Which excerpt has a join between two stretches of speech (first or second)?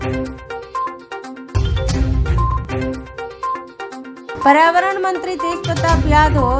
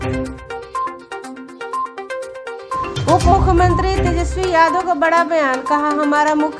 second